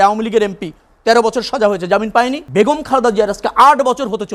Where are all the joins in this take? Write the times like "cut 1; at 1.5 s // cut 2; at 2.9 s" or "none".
cut 1; at 2.4 s